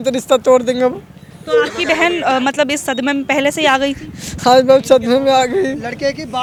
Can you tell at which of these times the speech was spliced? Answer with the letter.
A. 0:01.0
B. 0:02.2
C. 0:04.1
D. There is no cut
D